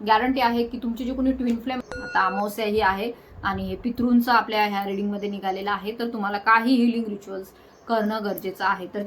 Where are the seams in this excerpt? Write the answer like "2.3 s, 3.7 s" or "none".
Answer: 1.8 s